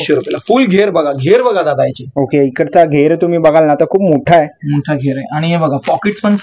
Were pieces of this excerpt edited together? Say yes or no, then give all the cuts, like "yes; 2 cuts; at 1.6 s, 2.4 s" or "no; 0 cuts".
no; 0 cuts